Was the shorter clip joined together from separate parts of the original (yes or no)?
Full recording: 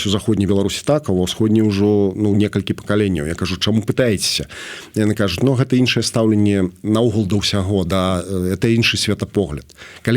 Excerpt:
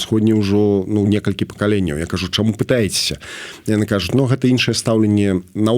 no